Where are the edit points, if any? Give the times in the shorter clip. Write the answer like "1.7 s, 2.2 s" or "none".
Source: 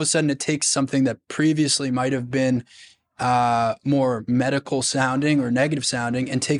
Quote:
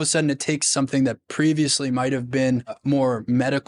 2.8 s